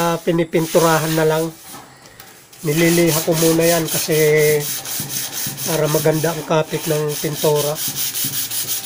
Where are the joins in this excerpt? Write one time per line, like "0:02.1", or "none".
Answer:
none